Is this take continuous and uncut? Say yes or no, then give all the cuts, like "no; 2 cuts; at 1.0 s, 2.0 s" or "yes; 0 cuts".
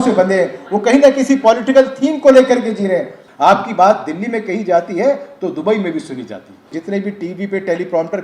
no; 2 cuts; at 3.2 s, 6.7 s